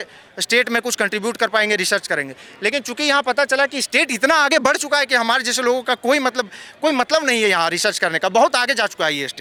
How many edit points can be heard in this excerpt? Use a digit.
0